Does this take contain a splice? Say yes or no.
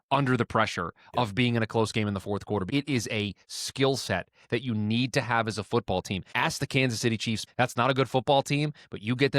yes